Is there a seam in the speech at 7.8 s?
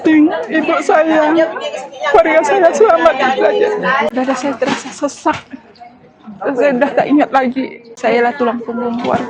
yes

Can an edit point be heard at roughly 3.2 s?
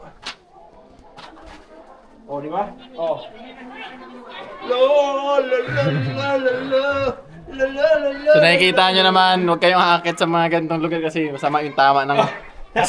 no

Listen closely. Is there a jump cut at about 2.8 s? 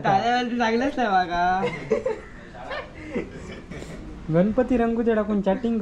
no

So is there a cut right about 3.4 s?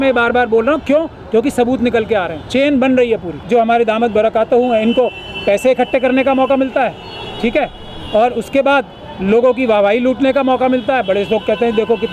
yes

